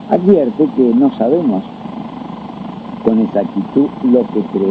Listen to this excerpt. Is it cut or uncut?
cut